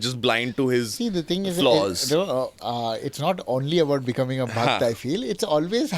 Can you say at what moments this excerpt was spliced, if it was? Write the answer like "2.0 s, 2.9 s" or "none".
none